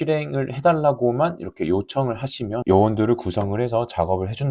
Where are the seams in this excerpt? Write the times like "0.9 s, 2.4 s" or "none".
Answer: 2.6 s